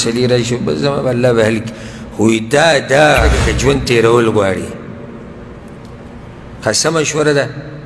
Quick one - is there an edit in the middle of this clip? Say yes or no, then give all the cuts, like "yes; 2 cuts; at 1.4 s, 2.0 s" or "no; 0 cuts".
yes; 1 cut; at 3.4 s